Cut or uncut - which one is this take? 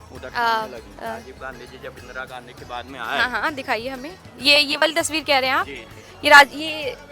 cut